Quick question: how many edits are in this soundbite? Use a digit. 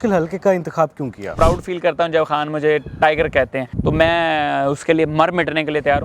2